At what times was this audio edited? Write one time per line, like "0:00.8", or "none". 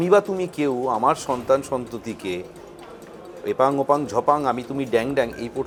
none